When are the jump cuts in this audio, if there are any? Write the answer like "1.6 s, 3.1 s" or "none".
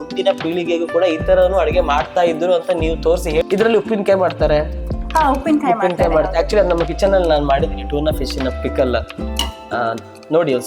3.4 s